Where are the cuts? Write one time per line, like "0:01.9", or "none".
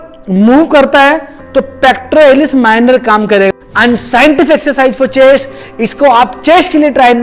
0:03.5
0:05.6